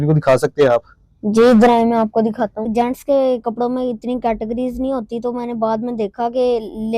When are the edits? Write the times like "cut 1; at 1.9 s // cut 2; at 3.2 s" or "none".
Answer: cut 1; at 2.7 s